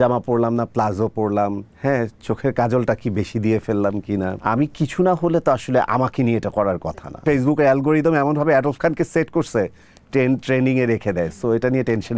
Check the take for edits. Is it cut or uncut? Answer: cut